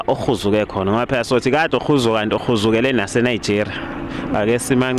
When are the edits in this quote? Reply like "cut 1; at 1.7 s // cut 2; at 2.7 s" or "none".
none